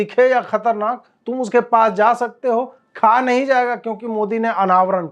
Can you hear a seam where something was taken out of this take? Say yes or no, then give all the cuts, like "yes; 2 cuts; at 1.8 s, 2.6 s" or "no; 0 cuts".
no; 0 cuts